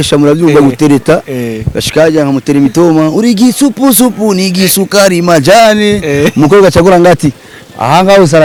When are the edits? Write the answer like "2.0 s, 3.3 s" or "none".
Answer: none